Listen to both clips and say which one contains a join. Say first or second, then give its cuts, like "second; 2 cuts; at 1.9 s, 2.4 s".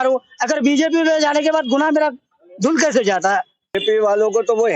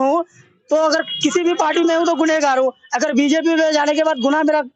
first; 1 cut; at 3.8 s